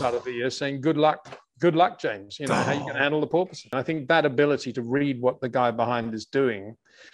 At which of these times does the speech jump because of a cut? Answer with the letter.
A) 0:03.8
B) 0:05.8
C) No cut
A